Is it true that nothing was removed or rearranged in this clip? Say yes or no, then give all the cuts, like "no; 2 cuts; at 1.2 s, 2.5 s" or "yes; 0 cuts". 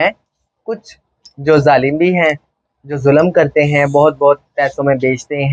yes; 0 cuts